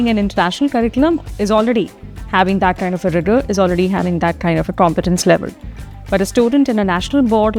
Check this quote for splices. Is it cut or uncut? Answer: uncut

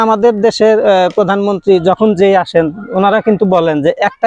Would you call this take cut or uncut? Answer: uncut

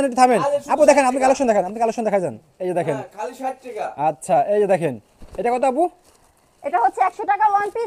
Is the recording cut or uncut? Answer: uncut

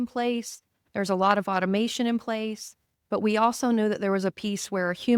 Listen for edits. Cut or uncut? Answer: uncut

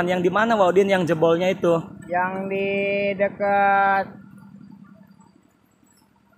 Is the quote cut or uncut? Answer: uncut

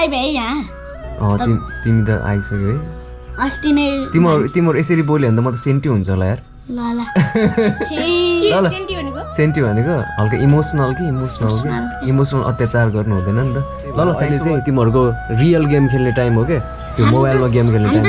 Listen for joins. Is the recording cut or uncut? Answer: cut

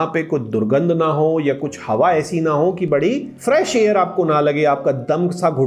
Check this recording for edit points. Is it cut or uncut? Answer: cut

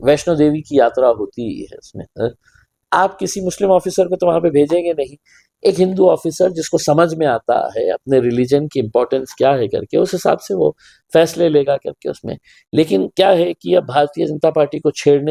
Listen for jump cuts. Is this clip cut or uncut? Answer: uncut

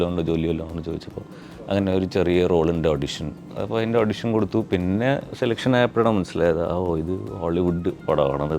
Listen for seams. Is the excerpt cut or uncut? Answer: cut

